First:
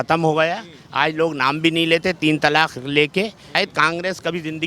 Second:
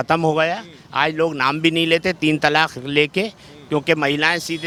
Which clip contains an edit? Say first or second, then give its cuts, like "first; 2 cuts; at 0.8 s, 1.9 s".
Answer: first; 1 cut; at 3.6 s